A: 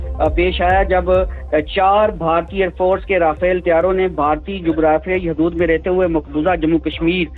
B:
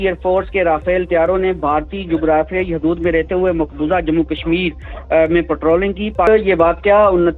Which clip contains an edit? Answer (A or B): B